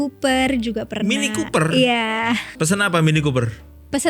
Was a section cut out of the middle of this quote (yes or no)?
yes